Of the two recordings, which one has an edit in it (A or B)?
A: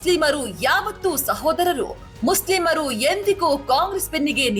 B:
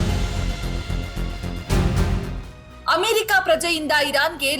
B